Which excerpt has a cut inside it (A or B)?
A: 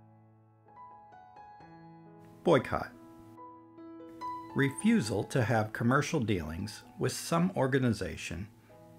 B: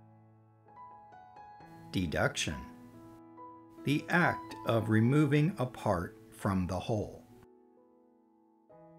A